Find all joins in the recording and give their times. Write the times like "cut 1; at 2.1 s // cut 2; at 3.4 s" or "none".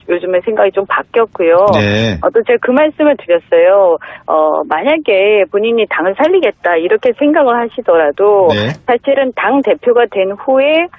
none